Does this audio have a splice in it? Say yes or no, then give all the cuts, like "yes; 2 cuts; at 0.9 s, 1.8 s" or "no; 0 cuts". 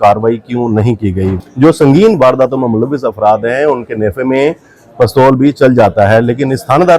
yes; 1 cut; at 1.3 s